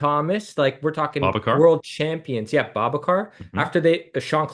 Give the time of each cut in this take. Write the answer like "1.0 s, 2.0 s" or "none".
none